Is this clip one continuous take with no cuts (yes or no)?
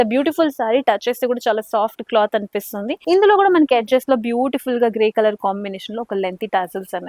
no